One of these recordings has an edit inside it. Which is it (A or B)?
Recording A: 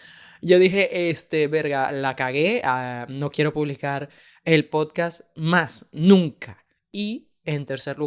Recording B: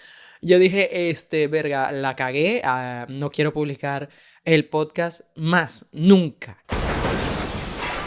A